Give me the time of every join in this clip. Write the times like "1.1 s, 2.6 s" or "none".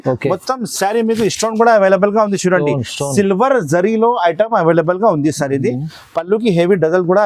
none